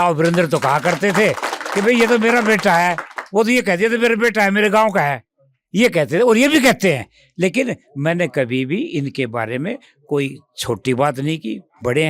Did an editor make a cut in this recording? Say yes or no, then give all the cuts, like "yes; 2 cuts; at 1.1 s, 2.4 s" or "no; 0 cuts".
no; 0 cuts